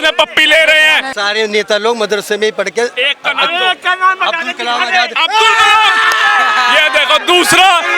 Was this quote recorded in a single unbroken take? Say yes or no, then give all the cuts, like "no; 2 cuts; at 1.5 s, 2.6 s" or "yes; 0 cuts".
no; 1 cut; at 1.1 s